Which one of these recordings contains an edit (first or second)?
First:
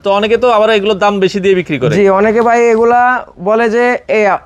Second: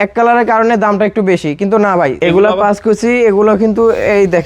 second